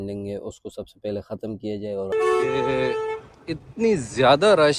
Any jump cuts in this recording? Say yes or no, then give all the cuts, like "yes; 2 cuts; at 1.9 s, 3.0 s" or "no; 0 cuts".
yes; 1 cut; at 2.1 s